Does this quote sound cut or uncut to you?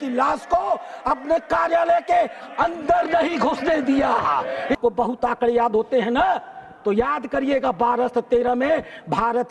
cut